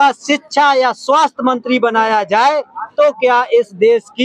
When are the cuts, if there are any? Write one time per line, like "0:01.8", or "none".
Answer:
none